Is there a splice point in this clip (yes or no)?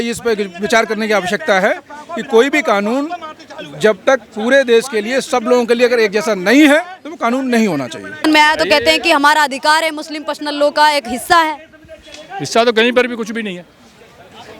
yes